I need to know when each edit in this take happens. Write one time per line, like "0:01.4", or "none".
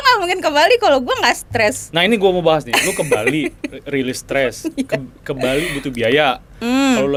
none